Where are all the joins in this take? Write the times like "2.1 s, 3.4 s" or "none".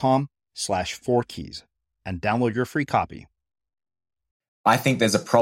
4.4 s